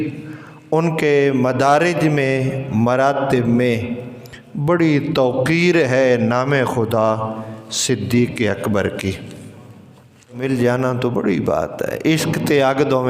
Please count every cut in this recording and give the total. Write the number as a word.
one